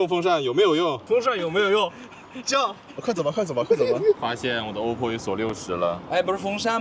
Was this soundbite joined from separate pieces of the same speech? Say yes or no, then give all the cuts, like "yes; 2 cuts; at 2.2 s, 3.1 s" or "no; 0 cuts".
yes; 2 cuts; at 1.0 s, 4.2 s